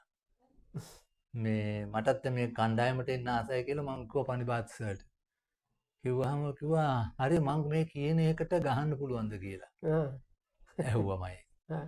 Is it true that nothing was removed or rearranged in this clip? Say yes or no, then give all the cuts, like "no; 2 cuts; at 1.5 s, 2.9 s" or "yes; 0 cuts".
yes; 0 cuts